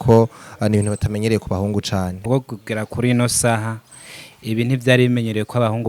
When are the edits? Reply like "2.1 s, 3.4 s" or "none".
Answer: 2.2 s